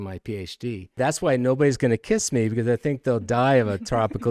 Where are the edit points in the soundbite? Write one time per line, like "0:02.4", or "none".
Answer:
0:01.0